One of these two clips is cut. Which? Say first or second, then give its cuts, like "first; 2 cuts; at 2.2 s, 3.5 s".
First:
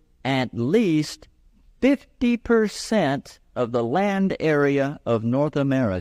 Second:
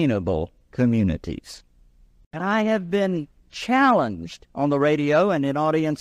second; 1 cut; at 2.4 s